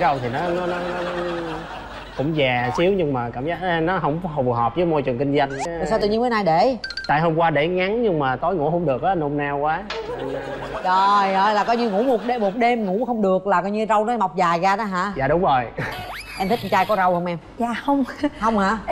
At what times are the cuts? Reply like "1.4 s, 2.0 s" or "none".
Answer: 5.7 s